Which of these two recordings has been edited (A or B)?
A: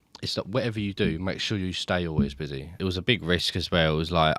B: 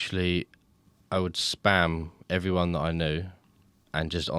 A